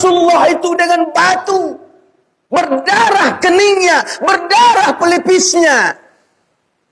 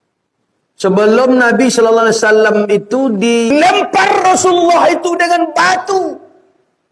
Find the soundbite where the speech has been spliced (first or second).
second